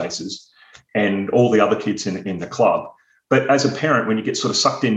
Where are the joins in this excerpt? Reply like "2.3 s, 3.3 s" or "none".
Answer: none